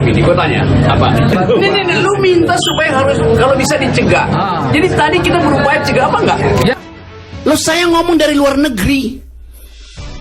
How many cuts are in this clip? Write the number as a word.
two